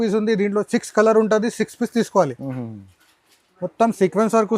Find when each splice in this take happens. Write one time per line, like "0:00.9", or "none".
0:02.3